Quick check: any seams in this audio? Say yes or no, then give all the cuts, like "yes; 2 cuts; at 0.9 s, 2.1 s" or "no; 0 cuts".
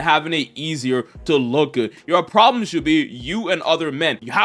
no; 0 cuts